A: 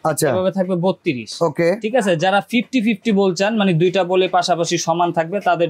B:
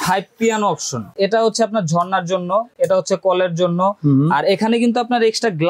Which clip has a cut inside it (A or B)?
B